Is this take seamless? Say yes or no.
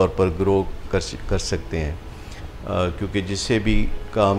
yes